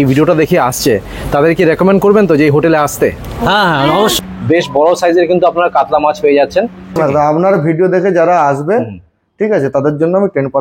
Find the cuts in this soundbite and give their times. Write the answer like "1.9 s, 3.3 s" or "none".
4.1 s, 7.0 s